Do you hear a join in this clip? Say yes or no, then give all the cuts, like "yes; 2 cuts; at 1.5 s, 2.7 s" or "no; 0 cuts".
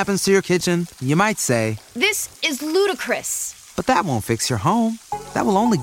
no; 0 cuts